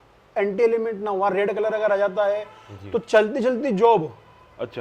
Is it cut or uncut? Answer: uncut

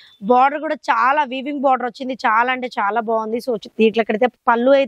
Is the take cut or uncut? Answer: uncut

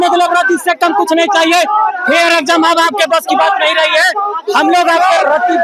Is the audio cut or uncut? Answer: uncut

